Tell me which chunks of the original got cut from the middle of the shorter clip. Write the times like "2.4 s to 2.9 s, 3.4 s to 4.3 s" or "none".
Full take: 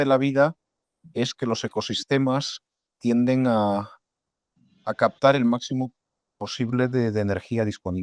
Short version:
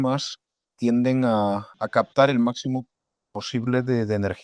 4.0 s to 4.8 s